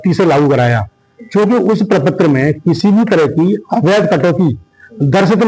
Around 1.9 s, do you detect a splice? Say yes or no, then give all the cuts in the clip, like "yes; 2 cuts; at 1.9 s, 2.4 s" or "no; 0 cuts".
no; 0 cuts